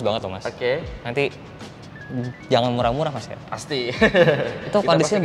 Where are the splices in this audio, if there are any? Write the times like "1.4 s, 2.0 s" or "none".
none